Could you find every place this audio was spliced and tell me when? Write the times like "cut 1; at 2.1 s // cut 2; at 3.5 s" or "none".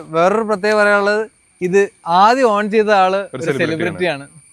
none

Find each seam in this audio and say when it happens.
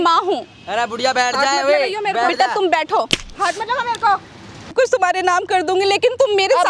cut 1; at 4.7 s

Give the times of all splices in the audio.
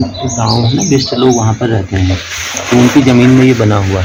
none

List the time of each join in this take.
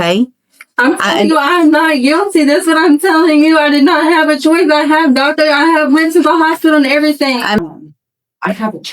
cut 1; at 7.6 s

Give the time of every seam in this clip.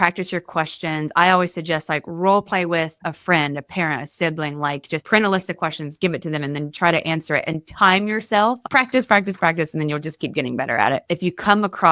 cut 1; at 8.6 s // cut 2; at 11.0 s

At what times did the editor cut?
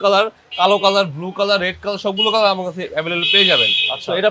none

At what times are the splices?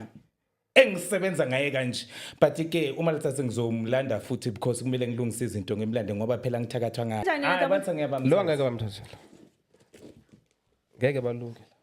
cut 1; at 7.2 s

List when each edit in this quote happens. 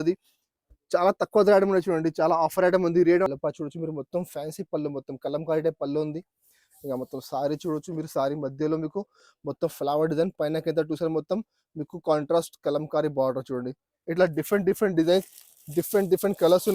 cut 1; at 3.3 s // cut 2; at 13.9 s

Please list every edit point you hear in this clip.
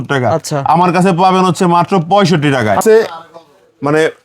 cut 1; at 2.8 s

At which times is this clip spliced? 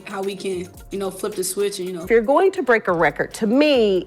cut 1; at 2.0 s

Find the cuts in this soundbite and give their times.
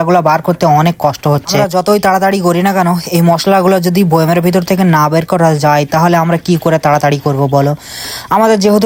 none

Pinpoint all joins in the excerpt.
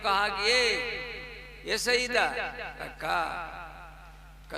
none

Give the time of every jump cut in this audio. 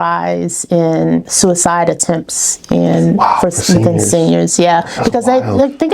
cut 1; at 1.3 s

